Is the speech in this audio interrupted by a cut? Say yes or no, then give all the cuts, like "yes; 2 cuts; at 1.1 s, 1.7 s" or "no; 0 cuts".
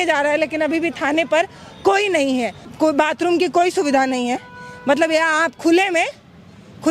yes; 1 cut; at 2.6 s